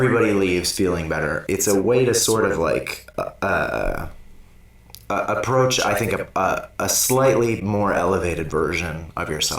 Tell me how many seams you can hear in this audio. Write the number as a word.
one